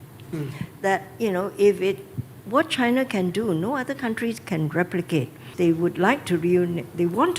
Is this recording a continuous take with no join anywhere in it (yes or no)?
no